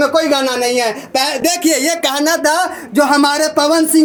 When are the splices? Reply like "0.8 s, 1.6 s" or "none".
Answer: none